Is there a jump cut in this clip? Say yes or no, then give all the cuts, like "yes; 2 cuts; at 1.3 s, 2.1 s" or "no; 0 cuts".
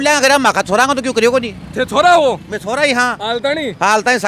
no; 0 cuts